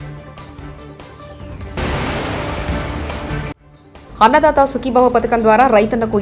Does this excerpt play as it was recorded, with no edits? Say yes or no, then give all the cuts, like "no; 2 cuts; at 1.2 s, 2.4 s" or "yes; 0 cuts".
no; 2 cuts; at 1.7 s, 3.3 s